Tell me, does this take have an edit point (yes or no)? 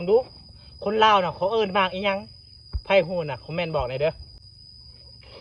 yes